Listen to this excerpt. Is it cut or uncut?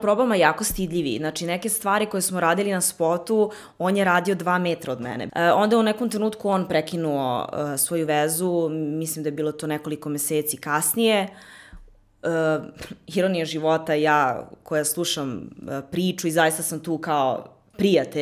cut